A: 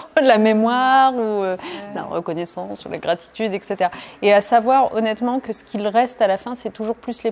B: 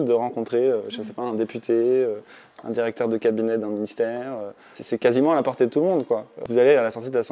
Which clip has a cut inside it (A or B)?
B